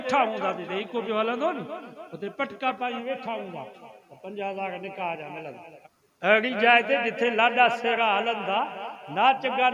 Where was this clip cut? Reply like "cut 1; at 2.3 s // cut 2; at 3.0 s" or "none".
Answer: cut 1; at 5.7 s